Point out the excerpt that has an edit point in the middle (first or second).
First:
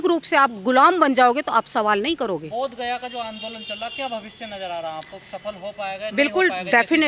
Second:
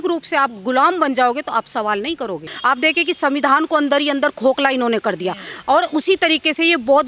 second